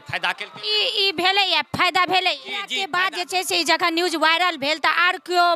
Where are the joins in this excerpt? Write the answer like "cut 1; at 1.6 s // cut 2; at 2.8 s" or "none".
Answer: cut 1; at 2.8 s